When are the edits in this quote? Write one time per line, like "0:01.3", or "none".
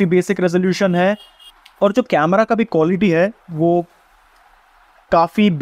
none